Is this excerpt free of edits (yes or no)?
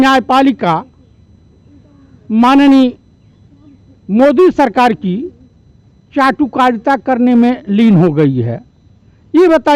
yes